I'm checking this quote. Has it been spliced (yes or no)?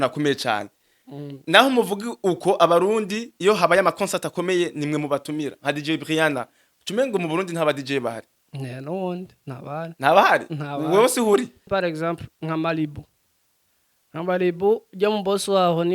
yes